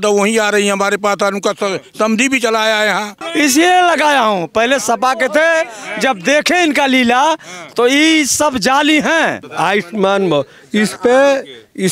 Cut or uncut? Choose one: cut